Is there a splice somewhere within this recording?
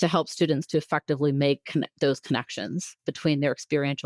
no; 0 cuts

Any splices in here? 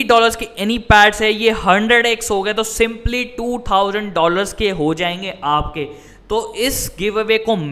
no; 0 cuts

